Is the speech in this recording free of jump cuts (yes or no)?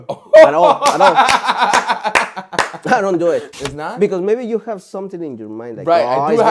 no